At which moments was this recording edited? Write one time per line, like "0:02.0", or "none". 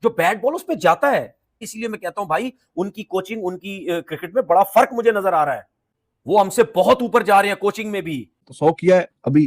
0:01.7
0:08.4